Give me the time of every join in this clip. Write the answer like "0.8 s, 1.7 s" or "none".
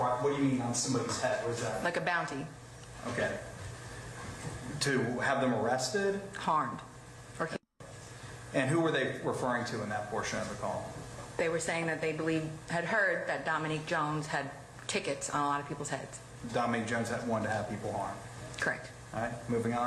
15.0 s